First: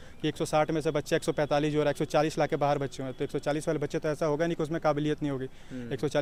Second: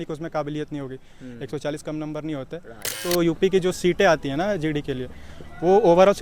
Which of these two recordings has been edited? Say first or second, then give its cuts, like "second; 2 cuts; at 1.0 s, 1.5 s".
second; 1 cut; at 3.0 s